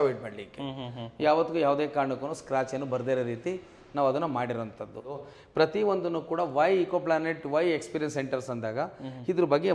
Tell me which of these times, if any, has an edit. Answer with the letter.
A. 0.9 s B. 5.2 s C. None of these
B